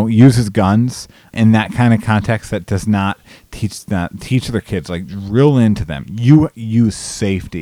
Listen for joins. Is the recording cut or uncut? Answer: cut